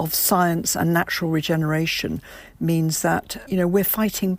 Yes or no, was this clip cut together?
yes